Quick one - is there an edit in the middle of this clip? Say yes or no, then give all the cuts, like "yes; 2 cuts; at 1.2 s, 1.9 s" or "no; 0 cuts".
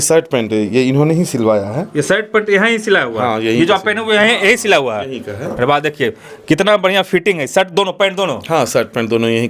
no; 0 cuts